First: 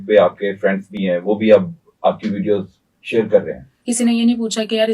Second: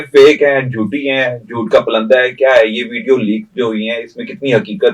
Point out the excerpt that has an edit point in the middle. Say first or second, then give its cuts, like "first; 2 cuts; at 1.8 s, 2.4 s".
first; 1 cut; at 3.7 s